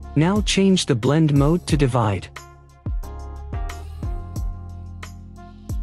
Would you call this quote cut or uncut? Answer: uncut